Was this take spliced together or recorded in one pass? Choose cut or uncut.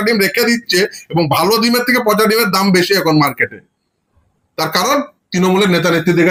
uncut